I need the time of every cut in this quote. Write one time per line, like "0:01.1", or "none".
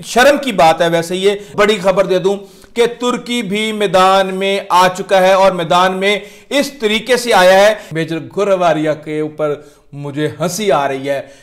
0:01.5
0:07.9